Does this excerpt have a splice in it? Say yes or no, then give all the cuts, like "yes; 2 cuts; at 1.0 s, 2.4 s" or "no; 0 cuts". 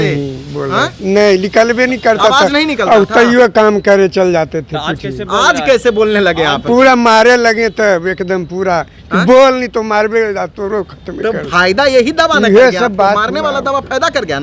no; 0 cuts